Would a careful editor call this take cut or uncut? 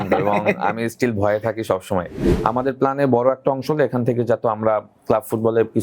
cut